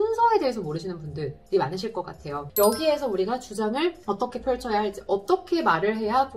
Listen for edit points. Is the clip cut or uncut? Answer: cut